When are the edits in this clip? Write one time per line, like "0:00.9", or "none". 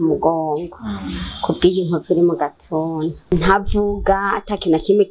0:03.2